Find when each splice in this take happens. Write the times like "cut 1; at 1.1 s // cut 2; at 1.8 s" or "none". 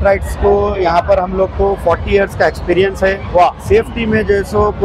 none